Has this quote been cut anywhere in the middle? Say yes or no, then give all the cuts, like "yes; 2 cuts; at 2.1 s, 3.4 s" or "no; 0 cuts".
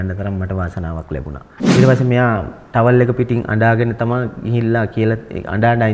yes; 1 cut; at 1.6 s